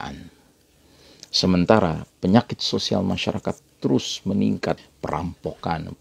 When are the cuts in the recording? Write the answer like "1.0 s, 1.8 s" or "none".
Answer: 4.9 s